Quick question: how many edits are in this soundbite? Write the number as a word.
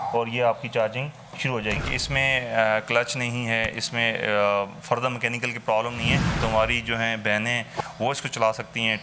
two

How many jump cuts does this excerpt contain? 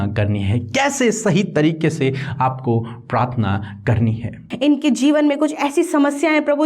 one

